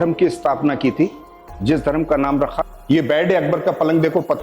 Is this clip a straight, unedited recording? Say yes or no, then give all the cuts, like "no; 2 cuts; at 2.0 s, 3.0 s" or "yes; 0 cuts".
no; 1 cut; at 2.6 s